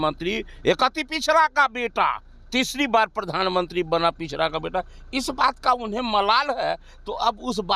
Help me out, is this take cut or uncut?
uncut